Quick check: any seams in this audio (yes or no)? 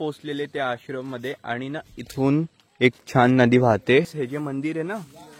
yes